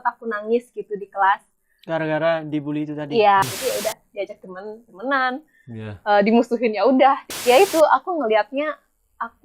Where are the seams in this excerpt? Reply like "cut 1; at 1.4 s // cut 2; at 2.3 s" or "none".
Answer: cut 1; at 3.4 s // cut 2; at 7.3 s